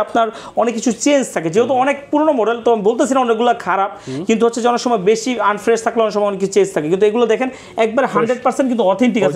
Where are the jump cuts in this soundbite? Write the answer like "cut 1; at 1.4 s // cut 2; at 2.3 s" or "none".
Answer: none